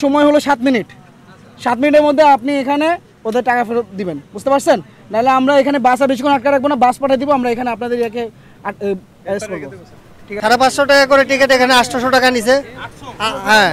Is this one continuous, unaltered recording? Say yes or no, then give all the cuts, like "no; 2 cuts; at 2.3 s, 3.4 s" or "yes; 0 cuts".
no; 1 cut; at 10.4 s